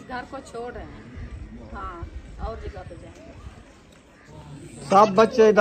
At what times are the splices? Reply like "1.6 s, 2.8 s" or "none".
none